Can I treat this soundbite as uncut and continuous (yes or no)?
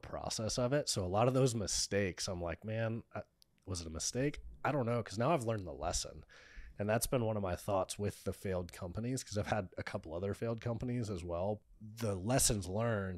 no